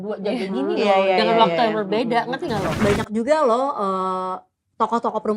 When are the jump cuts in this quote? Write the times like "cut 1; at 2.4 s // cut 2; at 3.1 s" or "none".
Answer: cut 1; at 2.8 s